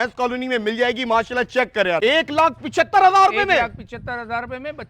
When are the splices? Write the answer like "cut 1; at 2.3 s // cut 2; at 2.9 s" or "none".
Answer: cut 1; at 2.0 s